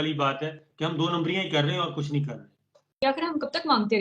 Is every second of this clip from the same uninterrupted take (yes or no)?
no